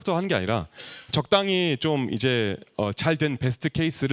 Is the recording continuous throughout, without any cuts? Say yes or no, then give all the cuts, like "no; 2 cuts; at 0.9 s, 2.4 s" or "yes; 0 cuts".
yes; 0 cuts